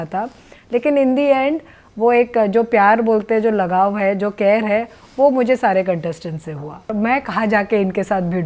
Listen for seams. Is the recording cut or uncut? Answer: cut